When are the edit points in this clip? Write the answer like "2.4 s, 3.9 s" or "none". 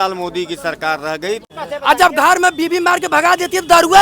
1.5 s